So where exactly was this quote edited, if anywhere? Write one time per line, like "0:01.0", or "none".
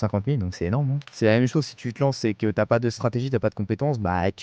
0:01.0